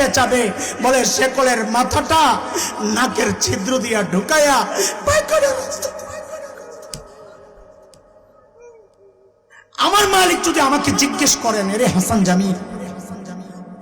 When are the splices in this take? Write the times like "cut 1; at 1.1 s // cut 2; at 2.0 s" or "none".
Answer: cut 1; at 9.5 s